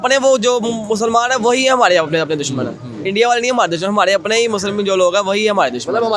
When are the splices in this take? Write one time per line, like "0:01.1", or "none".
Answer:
none